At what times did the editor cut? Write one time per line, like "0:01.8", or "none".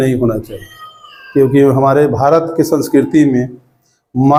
none